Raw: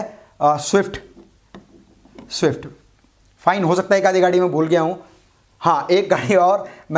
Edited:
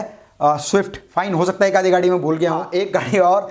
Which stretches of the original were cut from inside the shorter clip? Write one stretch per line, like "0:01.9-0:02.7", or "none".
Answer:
0:01.0-0:03.3
0:05.0-0:05.8